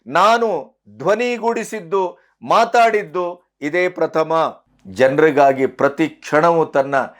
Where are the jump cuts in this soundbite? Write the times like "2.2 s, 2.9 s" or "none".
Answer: 4.7 s

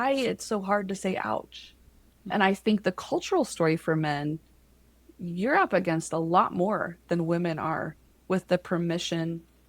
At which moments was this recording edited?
2.3 s

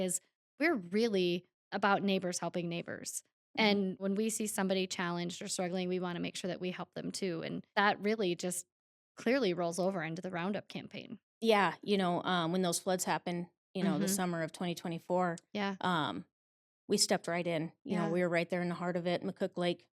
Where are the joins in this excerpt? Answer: 4.0 s, 7.6 s

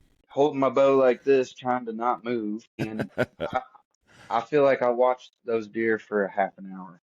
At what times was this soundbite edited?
2.8 s

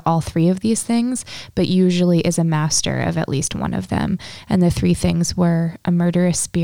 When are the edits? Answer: none

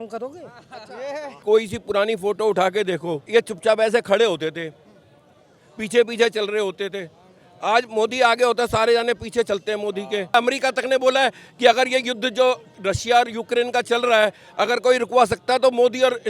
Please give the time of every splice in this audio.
1.3 s, 10.3 s, 12.7 s

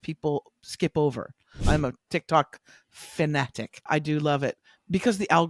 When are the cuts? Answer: 1.6 s

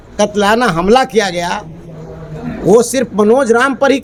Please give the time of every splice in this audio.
none

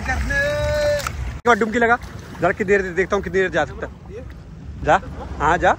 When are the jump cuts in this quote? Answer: 1.2 s

